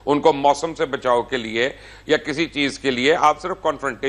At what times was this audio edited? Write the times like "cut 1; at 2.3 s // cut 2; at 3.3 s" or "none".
none